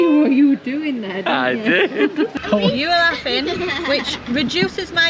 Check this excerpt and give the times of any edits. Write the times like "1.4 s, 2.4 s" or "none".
2.3 s